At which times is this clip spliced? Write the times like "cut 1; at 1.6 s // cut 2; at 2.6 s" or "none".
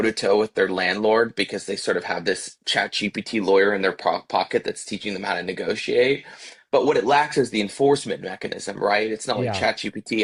none